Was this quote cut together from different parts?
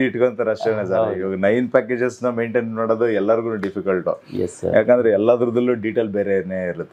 no; 0 cuts

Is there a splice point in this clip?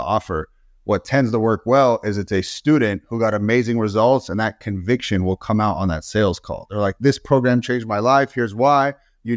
no; 0 cuts

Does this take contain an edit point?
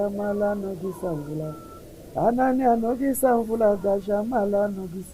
no; 0 cuts

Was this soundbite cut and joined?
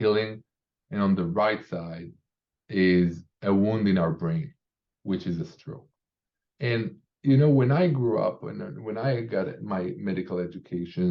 no; 0 cuts

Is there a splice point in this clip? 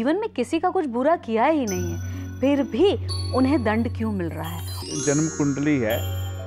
yes; 1 cut; at 4.8 s

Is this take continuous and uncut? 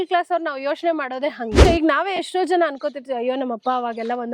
no; 1 cut; at 1.7 s

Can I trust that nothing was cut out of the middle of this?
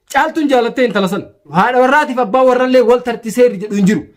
no; 1 cut; at 1.5 s

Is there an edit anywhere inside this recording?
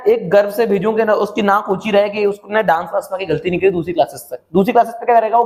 no; 0 cuts

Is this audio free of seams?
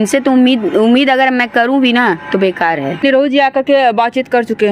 no; 1 cut; at 3.0 s

